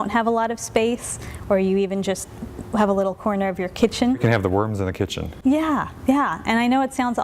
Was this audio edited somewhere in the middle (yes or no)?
yes